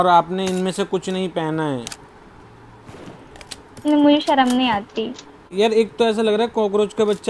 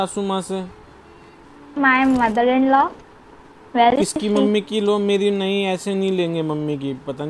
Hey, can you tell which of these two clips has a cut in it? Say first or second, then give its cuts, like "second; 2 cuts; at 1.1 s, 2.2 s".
first; 1 cut; at 5.4 s